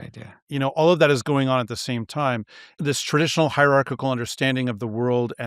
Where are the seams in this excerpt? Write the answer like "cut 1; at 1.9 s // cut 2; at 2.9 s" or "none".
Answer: cut 1; at 2.7 s